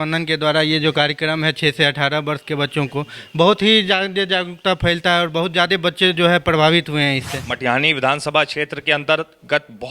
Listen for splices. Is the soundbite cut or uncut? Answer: cut